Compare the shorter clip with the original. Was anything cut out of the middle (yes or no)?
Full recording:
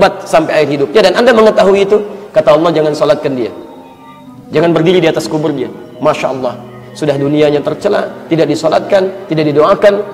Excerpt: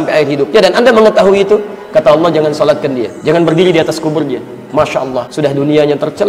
yes